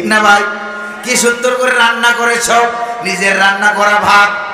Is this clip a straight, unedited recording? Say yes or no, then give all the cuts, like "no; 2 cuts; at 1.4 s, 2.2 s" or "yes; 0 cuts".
yes; 0 cuts